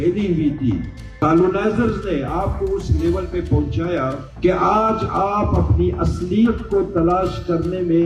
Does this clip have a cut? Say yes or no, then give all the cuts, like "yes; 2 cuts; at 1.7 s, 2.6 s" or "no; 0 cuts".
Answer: yes; 2 cuts; at 1.0 s, 4.3 s